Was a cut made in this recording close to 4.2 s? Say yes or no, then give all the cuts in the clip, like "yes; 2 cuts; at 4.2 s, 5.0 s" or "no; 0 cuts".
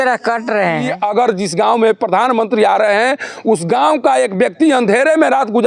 no; 1 cut; at 1.0 s